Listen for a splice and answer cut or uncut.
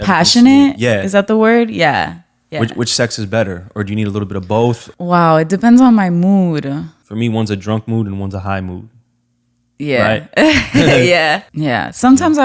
cut